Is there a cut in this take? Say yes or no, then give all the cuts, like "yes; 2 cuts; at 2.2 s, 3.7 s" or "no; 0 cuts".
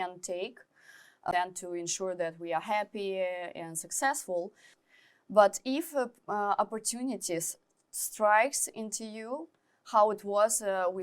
yes; 2 cuts; at 1.3 s, 4.6 s